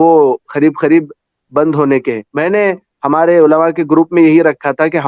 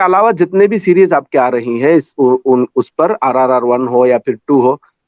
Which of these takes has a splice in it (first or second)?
first